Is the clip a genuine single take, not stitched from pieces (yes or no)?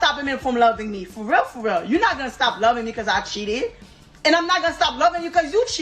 no